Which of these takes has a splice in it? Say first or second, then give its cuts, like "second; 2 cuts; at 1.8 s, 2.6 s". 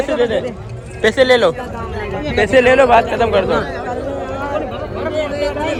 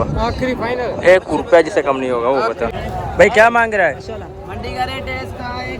second; 1 cut; at 2.7 s